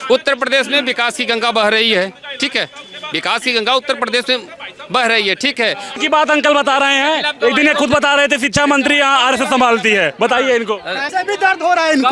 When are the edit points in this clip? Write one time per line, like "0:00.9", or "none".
0:06.0
0:11.1